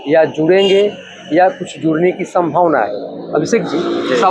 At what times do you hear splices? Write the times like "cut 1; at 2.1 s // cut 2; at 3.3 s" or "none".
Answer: none